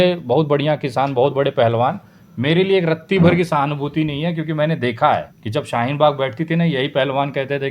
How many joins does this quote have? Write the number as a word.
one